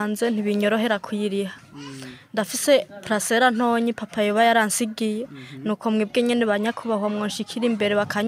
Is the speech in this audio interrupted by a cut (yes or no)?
no